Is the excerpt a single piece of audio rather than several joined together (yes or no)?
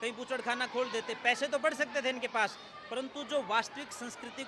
yes